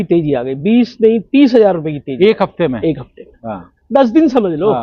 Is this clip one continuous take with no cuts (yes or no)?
yes